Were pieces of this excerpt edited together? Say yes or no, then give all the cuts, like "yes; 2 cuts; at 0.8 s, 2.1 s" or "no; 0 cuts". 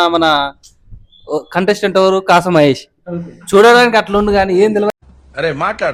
no; 0 cuts